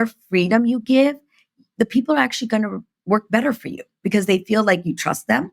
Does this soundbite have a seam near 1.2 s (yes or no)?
no